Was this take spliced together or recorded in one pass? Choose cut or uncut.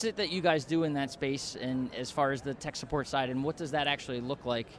uncut